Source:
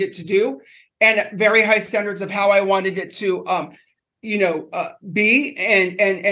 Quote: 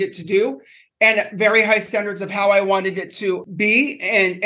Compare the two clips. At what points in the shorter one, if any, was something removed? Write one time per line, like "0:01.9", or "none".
0:03.4